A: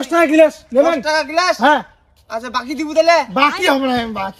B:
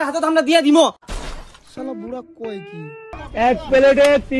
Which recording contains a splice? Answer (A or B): B